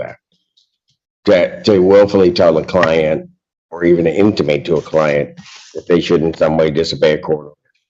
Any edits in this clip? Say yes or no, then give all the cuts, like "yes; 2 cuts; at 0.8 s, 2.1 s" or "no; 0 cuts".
no; 0 cuts